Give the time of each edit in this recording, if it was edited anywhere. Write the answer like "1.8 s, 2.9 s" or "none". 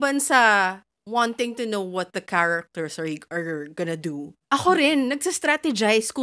4.3 s

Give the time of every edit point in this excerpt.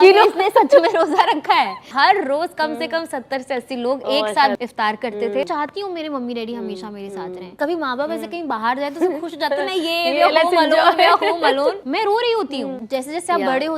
1.8 s, 4.6 s, 5.5 s, 7.5 s, 11.8 s, 12.8 s

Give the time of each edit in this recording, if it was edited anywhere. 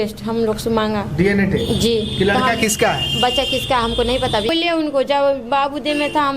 4.5 s

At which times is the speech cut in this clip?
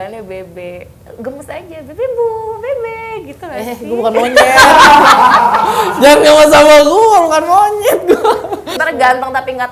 8.8 s

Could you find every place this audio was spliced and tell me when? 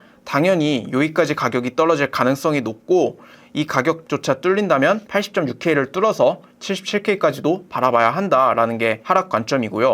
6.5 s

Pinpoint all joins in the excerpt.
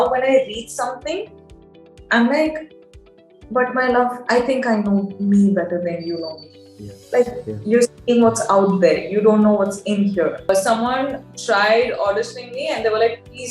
10.5 s

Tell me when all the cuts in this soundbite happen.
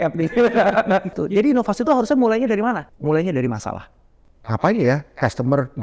1.2 s, 2.9 s, 4.2 s

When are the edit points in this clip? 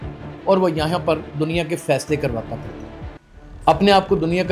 none

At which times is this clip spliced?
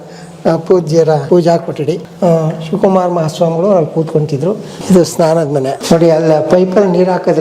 1.2 s, 2.1 s, 4.7 s, 5.8 s

